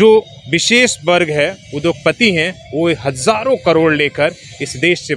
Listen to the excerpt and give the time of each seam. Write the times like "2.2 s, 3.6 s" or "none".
none